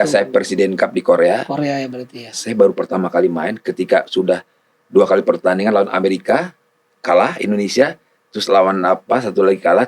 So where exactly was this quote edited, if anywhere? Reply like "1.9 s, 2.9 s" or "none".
none